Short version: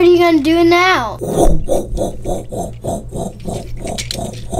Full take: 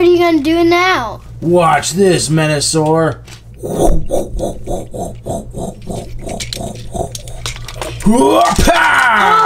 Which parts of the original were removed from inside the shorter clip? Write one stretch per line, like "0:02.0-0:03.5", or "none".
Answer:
0:01.2-0:03.6